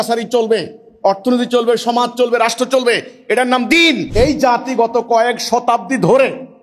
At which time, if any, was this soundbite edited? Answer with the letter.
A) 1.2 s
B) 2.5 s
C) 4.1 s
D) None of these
C